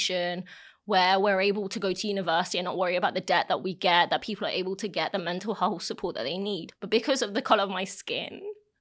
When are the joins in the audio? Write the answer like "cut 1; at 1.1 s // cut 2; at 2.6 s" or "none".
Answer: cut 1; at 6.7 s

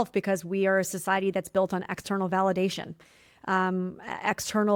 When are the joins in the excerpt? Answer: none

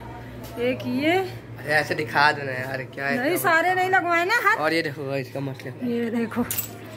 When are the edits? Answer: none

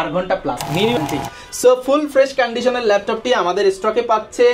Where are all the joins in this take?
cut 1; at 1.0 s

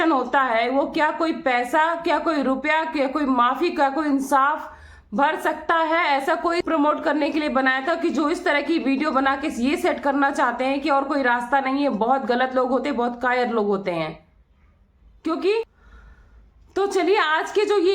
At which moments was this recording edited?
cut 1; at 6.6 s // cut 2; at 15.8 s

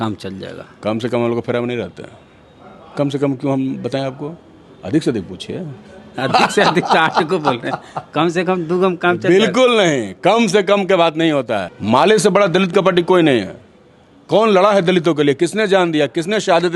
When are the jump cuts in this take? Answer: cut 1; at 11.7 s

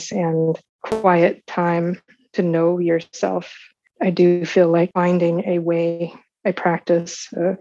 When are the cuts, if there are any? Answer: cut 1; at 1.0 s // cut 2; at 3.8 s // cut 3; at 4.9 s

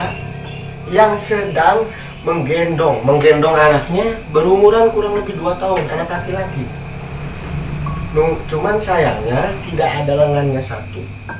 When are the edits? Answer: cut 1; at 9.6 s

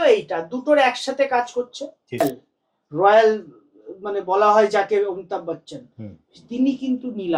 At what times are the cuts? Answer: cut 1; at 2.2 s

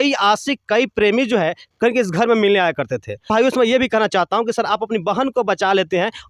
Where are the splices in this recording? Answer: cut 1; at 3.3 s

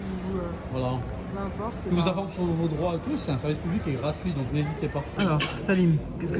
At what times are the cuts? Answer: cut 1; at 5.1 s

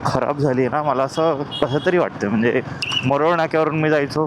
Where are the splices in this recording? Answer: cut 1; at 3.0 s

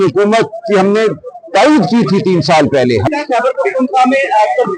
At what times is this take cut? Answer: cut 1; at 3.1 s

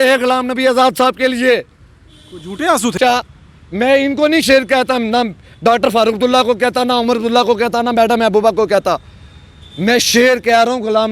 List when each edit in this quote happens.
cut 1; at 3.0 s

